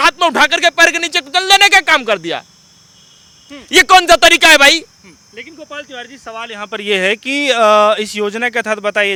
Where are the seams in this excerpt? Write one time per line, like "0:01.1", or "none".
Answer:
none